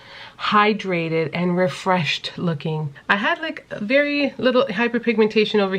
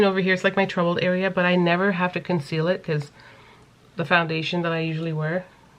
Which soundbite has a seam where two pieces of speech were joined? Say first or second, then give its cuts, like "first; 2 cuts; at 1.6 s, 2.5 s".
first; 1 cut; at 2.9 s